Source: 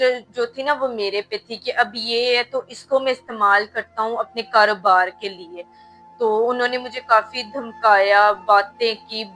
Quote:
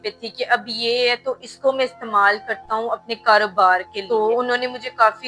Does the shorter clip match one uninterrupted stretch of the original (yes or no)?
no